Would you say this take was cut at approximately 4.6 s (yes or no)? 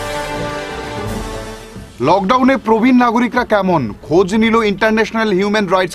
no